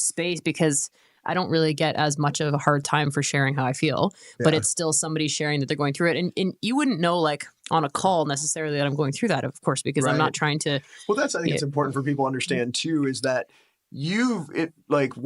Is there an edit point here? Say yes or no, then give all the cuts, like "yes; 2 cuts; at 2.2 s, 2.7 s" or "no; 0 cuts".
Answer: no; 0 cuts